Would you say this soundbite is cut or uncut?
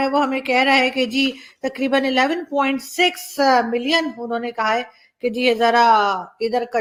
uncut